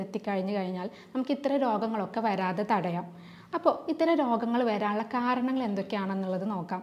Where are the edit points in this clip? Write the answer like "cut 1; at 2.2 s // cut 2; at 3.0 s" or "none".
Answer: none

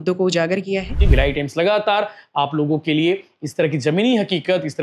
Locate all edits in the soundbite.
cut 1; at 1.0 s

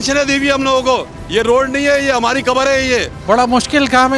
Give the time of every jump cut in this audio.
cut 1; at 1.2 s // cut 2; at 3.1 s

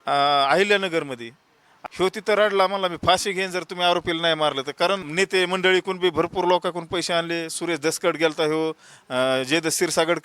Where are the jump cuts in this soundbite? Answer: cut 1; at 1.7 s // cut 2; at 5.0 s

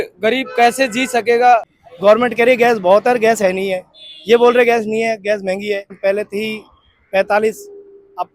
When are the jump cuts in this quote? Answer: cut 1; at 1.7 s // cut 2; at 6.0 s

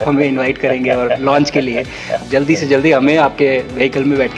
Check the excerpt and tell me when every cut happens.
cut 1; at 2.2 s

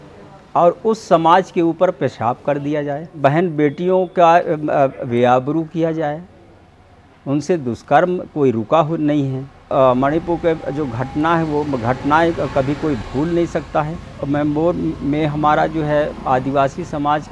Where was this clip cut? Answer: cut 1; at 3.2 s // cut 2; at 9.7 s // cut 3; at 14.2 s

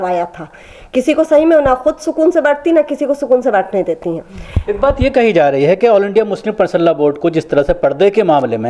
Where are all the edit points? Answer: none

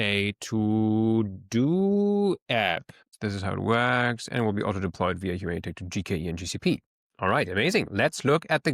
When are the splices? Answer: cut 1; at 3.1 s

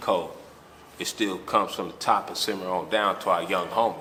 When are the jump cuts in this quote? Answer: none

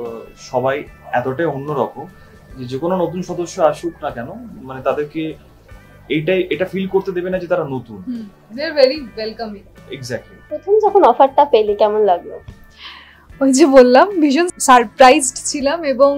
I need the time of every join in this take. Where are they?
cut 1; at 10.4 s // cut 2; at 14.5 s

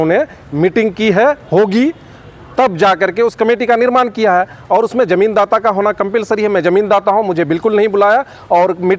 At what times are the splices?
none

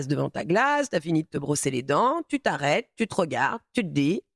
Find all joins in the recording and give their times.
none

